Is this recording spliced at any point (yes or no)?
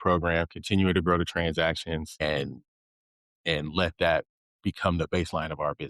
yes